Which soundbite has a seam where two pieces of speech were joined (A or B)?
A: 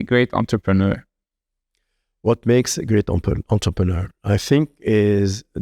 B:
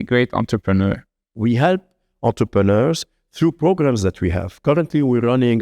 B